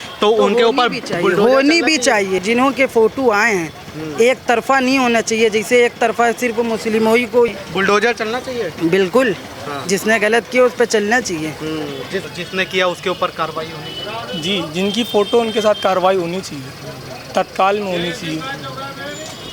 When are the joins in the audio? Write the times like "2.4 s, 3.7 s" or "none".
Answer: 2.4 s, 7.5 s, 12.3 s